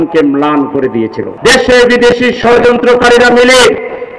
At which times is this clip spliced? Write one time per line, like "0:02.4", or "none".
0:01.3